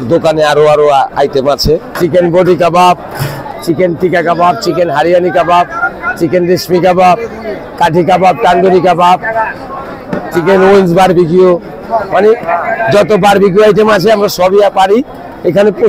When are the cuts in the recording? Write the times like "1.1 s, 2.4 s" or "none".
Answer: 1.9 s